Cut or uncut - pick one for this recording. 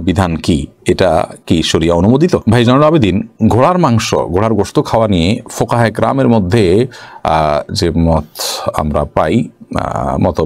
uncut